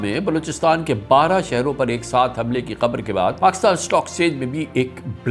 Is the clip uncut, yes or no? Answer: no